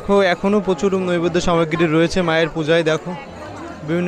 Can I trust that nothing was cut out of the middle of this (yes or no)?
yes